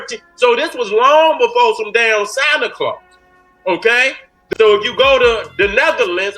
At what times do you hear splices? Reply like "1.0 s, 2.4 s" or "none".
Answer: 4.3 s